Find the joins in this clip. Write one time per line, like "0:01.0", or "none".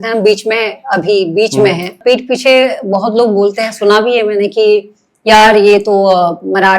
0:02.0